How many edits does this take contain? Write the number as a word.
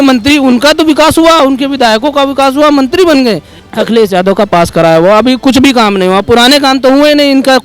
one